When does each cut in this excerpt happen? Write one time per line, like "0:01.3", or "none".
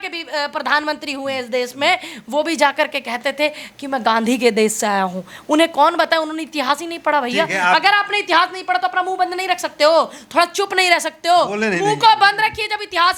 none